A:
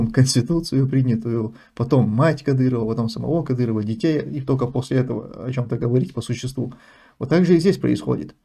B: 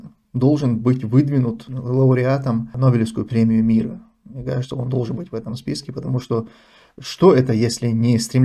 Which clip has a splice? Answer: B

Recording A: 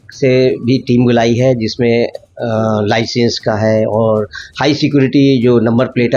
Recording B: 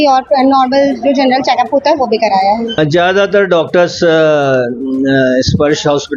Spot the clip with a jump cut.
B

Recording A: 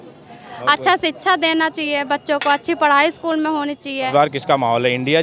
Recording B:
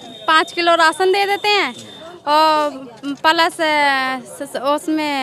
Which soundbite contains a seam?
A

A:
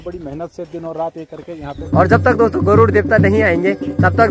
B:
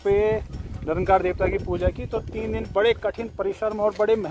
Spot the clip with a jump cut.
A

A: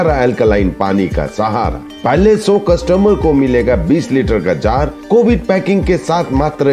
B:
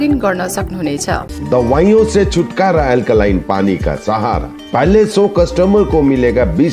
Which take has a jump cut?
B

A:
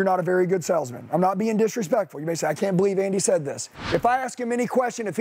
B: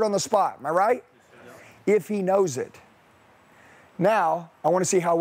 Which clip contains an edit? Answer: A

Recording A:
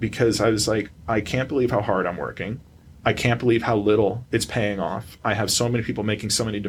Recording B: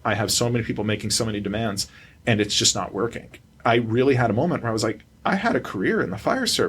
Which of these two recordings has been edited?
B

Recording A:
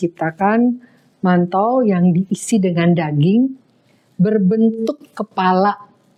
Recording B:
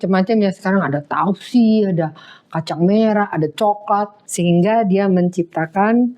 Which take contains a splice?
B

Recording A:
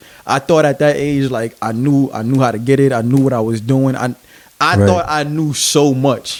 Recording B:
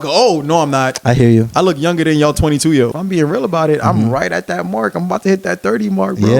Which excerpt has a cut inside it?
B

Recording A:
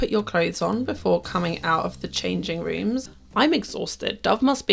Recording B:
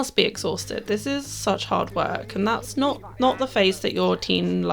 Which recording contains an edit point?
A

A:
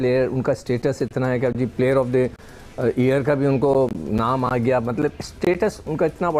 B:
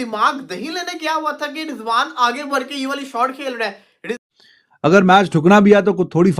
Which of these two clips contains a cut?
B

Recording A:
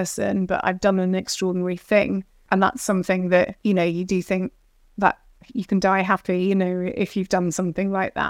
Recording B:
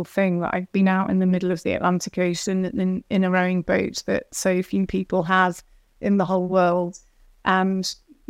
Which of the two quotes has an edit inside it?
A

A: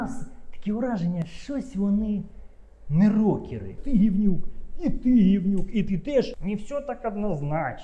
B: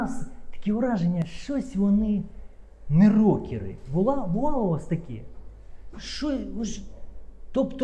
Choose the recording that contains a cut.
A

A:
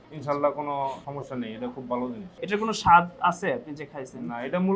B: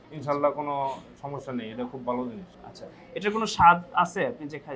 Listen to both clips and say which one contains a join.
A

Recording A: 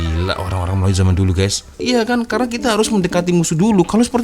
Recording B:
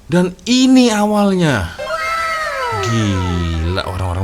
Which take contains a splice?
A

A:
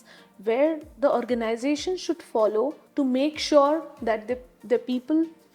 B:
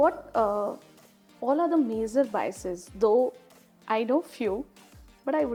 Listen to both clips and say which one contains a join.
A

